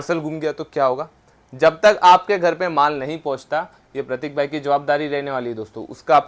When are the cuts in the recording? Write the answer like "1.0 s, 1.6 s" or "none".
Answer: none